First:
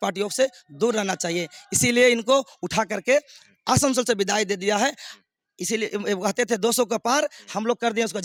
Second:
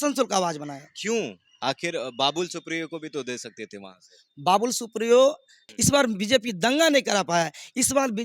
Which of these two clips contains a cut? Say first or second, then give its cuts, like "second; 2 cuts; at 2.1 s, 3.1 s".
second; 1 cut; at 5.7 s